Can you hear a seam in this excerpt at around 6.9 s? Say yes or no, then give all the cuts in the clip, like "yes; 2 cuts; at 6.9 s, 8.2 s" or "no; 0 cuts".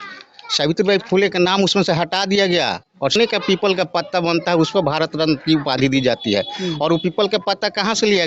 no; 1 cut; at 3.1 s